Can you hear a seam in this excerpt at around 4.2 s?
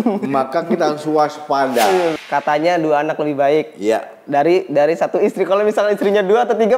no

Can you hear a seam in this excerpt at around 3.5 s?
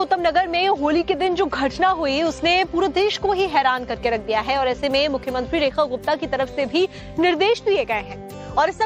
yes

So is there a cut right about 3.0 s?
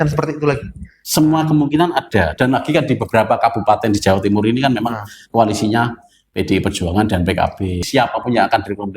no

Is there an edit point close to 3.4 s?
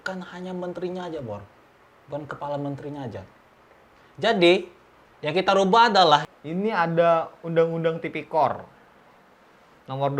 no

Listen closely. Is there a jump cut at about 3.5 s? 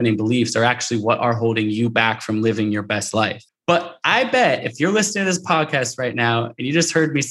yes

